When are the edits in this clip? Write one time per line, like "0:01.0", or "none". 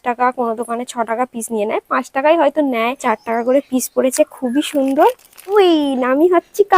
0:03.0
0:05.5